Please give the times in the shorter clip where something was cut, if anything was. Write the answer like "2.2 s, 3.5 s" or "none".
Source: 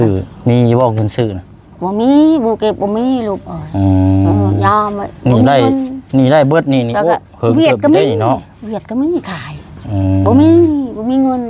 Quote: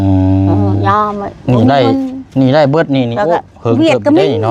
none